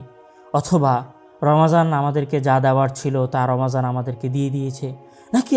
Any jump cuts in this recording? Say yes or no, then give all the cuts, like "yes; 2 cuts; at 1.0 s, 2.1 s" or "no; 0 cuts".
no; 0 cuts